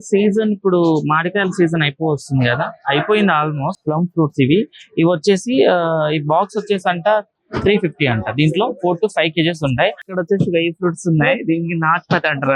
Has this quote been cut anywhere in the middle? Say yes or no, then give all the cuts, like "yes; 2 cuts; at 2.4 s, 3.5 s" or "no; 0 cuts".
yes; 2 cuts; at 3.8 s, 10.0 s